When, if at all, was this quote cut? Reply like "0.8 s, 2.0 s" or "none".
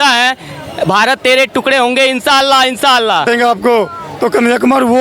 3.2 s